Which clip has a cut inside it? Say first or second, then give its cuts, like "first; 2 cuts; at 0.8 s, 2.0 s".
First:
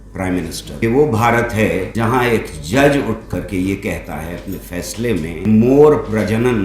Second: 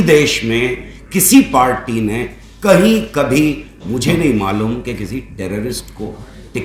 first; 3 cuts; at 0.8 s, 1.9 s, 5.5 s